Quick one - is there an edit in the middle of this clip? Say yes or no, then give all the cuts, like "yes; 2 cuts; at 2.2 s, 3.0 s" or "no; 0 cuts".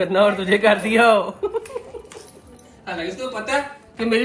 no; 0 cuts